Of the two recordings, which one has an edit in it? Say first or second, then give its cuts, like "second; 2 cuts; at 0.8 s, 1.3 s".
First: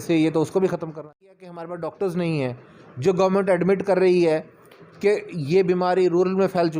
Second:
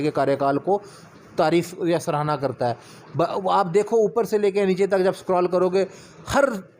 first; 1 cut; at 0.9 s